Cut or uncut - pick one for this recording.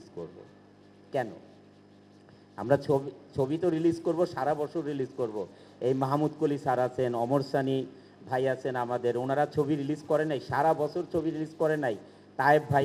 uncut